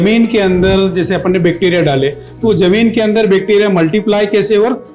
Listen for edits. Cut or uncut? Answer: uncut